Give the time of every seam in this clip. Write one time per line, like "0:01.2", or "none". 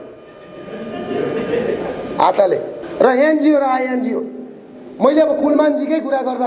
0:02.8